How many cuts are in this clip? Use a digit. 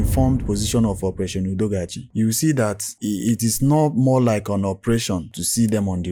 0